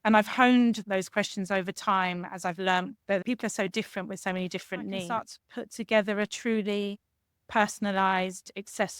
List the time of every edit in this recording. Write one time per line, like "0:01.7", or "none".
0:00.8
0:03.2
0:05.2